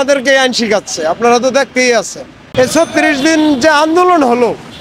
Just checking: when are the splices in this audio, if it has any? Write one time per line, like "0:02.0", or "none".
0:02.4